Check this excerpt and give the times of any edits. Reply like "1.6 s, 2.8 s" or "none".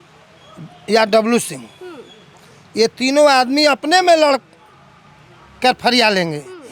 none